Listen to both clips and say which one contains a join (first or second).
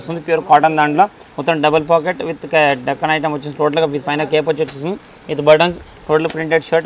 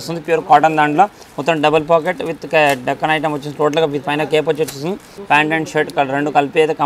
second